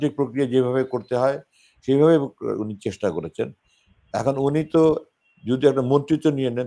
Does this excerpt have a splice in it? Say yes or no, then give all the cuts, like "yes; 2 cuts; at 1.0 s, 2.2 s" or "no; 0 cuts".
no; 0 cuts